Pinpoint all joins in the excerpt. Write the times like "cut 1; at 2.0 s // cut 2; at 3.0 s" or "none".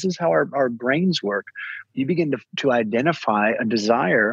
cut 1; at 1.7 s